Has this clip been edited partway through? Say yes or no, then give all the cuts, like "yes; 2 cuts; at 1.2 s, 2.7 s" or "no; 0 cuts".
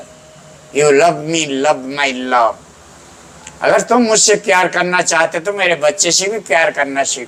no; 0 cuts